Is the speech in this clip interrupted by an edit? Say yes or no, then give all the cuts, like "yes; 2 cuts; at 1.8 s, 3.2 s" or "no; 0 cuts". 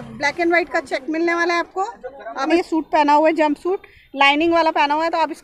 yes; 1 cut; at 2.5 s